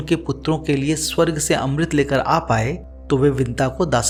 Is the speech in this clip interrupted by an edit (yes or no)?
no